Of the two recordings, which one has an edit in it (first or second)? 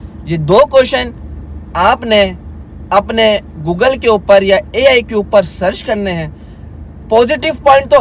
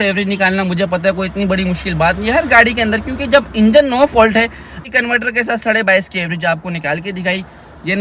second